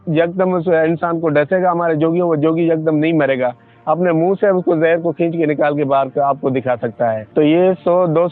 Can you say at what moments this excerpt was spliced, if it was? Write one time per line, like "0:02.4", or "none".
0:07.2